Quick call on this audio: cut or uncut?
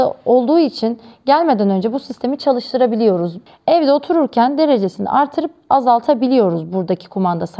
cut